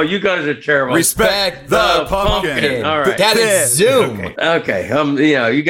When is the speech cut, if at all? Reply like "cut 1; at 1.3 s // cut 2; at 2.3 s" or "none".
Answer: cut 1; at 4.2 s